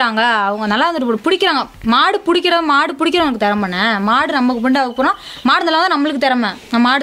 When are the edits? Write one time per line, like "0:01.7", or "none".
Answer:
none